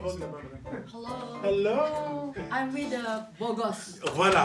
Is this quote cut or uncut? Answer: cut